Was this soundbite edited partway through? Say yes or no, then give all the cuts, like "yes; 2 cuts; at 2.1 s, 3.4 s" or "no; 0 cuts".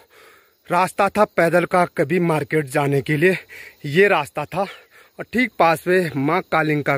no; 0 cuts